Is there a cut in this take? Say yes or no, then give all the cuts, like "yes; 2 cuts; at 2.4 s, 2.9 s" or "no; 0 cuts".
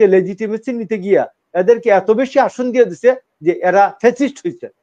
no; 0 cuts